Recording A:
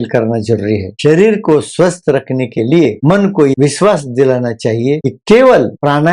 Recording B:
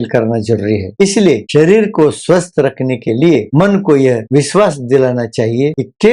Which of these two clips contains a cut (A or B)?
A